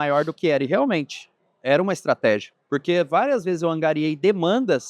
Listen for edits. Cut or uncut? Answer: cut